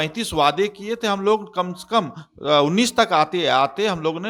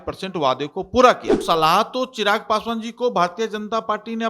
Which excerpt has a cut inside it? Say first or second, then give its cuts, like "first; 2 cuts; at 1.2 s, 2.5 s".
second; 1 cut; at 1.3 s